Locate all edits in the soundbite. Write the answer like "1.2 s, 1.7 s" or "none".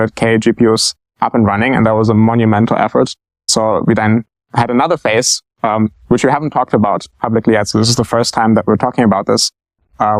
3.5 s, 4.4 s